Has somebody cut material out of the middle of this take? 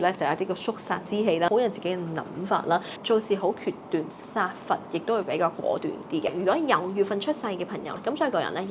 yes; 4 cuts; at 1.5 s, 2.9 s, 6.4 s, 7.9 s

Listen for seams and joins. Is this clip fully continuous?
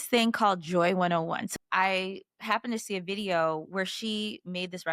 no; 1 cut; at 1.5 s

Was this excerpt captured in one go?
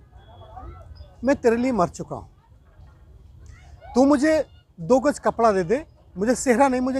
yes; 0 cuts

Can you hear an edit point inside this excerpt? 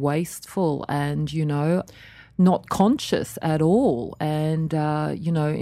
no; 0 cuts

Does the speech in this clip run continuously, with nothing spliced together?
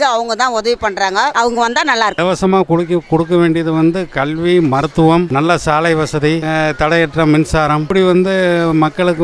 no; 1 cut; at 2.1 s

